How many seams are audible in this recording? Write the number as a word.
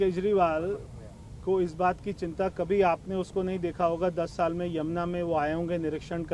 zero